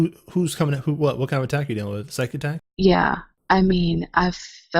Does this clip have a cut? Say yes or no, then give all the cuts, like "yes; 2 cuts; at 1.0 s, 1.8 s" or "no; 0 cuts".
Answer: yes; 2 cuts; at 2.7 s, 3.3 s